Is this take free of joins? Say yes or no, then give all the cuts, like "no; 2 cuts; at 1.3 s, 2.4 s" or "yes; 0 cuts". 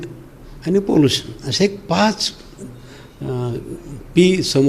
yes; 0 cuts